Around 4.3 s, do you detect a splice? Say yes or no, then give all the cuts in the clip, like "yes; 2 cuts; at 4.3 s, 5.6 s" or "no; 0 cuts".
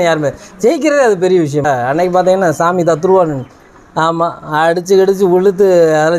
no; 1 cut; at 1.6 s